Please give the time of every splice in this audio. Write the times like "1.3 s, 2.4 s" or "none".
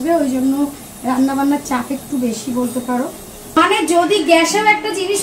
3.6 s